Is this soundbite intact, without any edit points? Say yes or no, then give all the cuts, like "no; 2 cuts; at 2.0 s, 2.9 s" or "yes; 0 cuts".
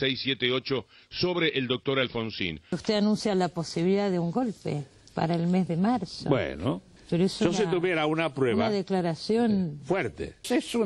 no; 1 cut; at 2.8 s